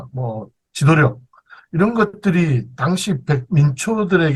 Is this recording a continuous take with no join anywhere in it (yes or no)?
yes